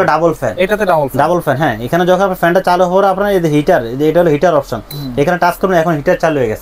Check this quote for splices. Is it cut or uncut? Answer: uncut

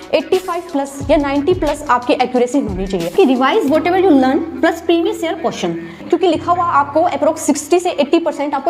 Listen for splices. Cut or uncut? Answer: cut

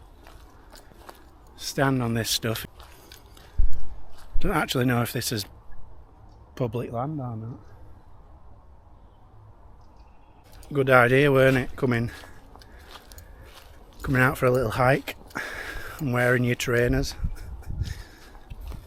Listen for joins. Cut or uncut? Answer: cut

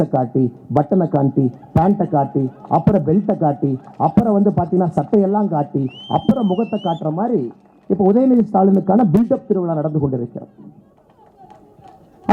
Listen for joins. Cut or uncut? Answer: uncut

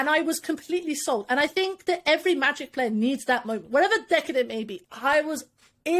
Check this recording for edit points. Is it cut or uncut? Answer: cut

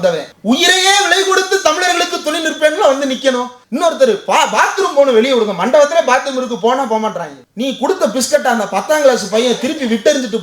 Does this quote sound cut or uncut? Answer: cut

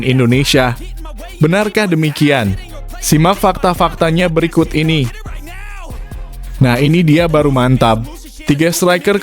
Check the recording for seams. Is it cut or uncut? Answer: cut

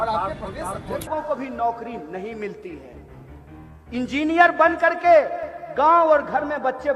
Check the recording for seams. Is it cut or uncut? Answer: cut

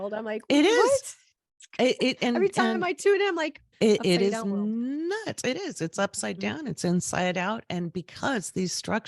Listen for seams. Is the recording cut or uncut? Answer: cut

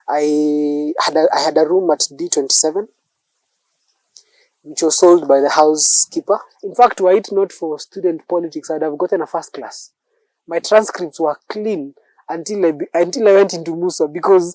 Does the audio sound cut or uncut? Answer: cut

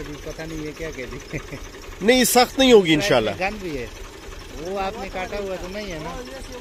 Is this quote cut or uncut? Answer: uncut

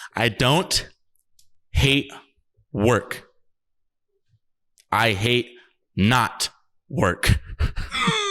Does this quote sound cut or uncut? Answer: uncut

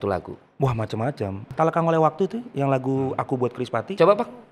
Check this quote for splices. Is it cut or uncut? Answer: cut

